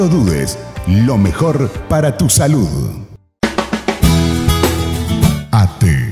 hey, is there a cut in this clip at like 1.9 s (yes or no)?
no